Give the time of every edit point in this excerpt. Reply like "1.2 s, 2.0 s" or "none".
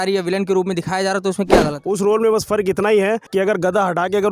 1.8 s, 3.2 s